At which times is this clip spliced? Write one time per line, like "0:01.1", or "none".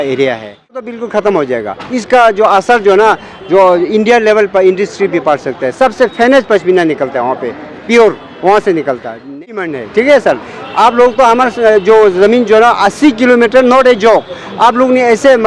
0:00.9
0:09.4